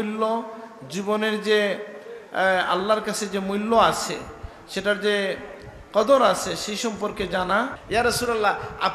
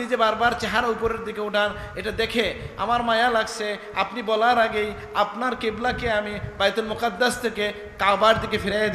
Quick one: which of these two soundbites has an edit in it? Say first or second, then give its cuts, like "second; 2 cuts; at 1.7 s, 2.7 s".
first; 1 cut; at 7.8 s